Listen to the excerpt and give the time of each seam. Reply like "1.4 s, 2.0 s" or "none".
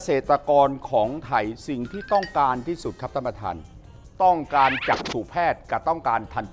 none